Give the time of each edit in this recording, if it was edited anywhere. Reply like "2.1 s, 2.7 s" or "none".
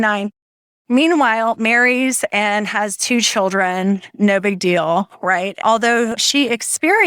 5.6 s